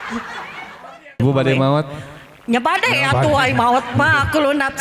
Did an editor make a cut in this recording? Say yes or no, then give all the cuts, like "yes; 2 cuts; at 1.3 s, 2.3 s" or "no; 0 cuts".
yes; 1 cut; at 1.2 s